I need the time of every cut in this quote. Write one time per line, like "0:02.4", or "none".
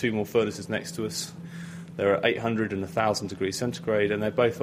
0:01.4